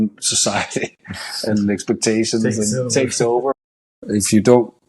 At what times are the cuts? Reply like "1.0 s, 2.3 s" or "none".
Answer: 3.9 s